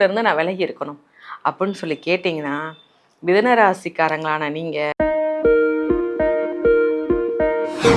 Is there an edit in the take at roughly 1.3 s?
no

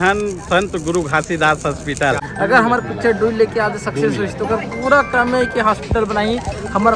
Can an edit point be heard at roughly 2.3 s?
yes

